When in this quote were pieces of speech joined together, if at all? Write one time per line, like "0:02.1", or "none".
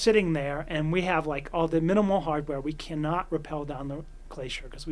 none